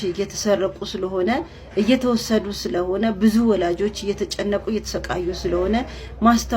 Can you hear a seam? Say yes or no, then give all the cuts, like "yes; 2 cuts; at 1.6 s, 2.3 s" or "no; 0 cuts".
no; 0 cuts